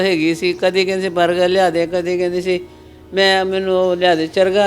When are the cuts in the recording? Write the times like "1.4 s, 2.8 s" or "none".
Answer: none